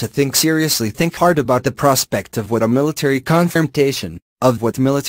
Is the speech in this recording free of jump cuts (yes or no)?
yes